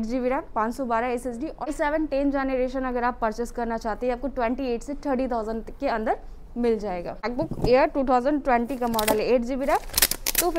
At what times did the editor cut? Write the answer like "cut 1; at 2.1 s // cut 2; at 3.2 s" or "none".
cut 1; at 1.7 s // cut 2; at 7.3 s